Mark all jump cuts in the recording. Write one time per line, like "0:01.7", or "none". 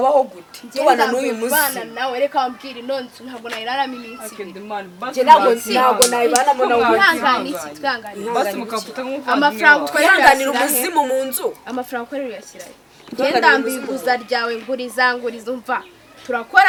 none